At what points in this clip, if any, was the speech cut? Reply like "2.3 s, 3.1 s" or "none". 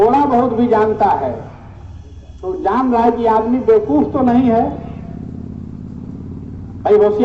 none